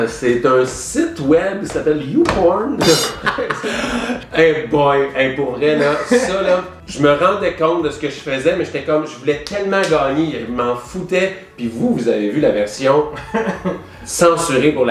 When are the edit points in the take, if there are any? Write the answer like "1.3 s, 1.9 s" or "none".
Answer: none